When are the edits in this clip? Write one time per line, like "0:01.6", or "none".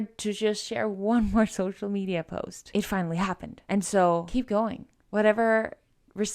none